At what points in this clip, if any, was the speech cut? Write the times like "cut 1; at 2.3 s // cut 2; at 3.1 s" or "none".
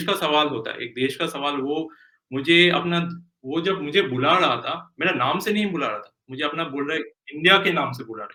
none